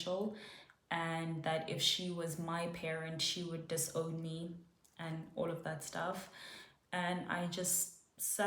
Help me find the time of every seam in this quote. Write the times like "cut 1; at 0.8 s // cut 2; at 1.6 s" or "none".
none